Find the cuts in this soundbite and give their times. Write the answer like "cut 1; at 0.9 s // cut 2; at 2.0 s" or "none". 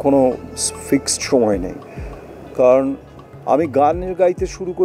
none